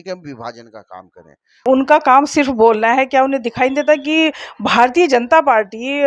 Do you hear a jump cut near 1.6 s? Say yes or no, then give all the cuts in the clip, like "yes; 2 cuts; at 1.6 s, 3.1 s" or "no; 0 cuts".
yes; 1 cut; at 1.6 s